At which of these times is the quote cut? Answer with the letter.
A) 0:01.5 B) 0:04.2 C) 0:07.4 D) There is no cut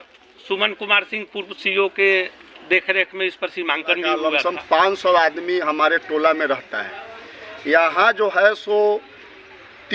B